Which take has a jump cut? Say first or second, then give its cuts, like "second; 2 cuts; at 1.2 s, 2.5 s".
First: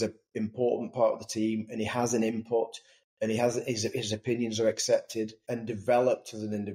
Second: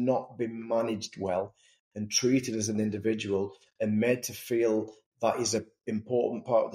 first; 1 cut; at 5.4 s